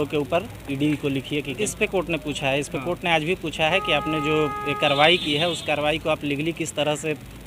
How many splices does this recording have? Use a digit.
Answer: 1